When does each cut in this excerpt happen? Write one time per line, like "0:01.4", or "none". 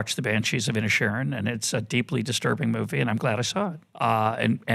0:03.8

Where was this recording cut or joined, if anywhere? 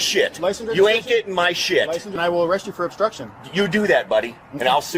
0:02.1

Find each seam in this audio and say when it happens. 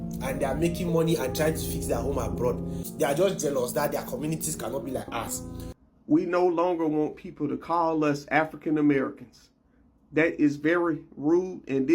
0:02.8
0:05.7

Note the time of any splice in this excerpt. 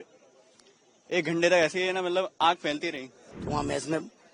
0:03.3

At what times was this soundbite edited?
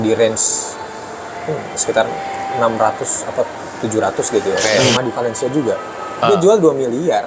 0:04.6

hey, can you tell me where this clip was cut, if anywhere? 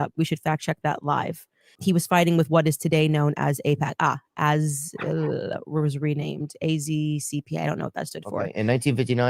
0:01.7

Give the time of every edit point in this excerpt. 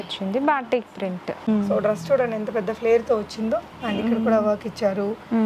0:01.5

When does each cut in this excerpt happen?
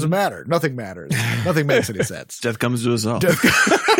0:02.2

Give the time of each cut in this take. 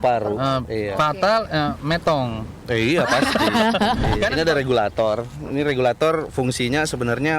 0:04.3

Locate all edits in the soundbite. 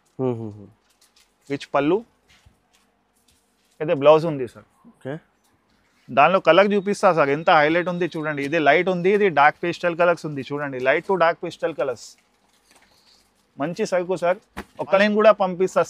0:15.0

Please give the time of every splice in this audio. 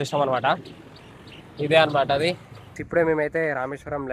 0:02.8

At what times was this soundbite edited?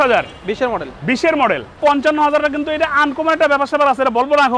0:01.8

